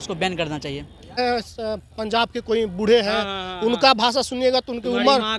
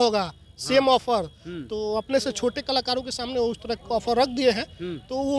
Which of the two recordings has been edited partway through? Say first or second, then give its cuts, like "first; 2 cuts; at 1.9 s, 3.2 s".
first; 1 cut; at 1.2 s